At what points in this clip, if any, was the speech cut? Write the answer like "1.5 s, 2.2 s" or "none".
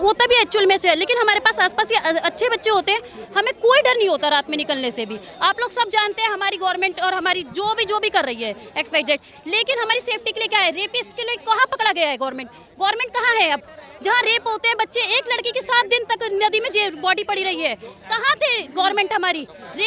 none